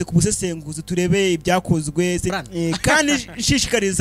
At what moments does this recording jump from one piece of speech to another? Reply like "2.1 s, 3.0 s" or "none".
2.3 s